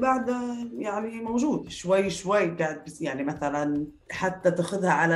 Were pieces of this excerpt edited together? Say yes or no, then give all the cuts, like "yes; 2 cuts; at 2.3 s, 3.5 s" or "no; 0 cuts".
yes; 2 cuts; at 1.7 s, 4.0 s